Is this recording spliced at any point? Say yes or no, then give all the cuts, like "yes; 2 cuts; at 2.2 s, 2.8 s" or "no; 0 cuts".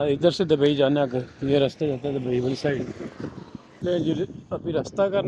no; 0 cuts